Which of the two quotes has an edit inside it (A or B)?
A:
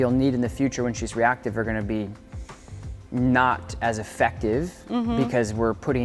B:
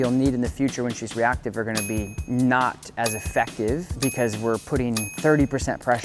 B